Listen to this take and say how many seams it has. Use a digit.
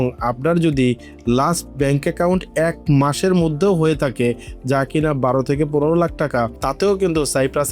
1